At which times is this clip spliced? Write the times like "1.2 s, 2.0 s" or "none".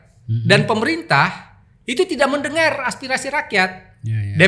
none